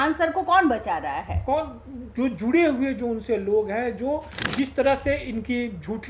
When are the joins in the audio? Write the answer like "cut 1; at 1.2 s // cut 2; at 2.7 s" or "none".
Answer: cut 1; at 4.4 s